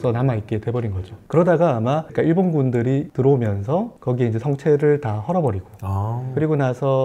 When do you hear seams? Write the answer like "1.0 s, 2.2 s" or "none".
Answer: none